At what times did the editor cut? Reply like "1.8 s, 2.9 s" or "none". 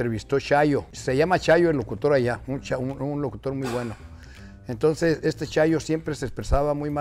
0.9 s